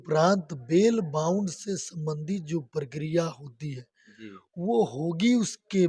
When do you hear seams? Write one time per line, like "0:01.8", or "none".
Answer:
none